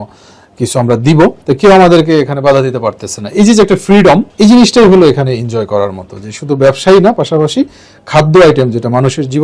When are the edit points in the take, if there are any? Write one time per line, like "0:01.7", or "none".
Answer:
0:01.4
0:04.3